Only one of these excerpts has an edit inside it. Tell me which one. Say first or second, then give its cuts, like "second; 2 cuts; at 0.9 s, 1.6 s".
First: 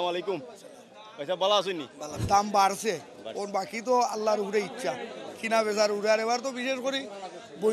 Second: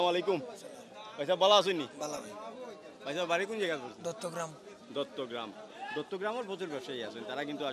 first; 1 cut; at 2.1 s